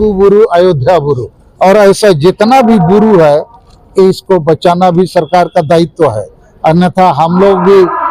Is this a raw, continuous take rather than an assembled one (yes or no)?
yes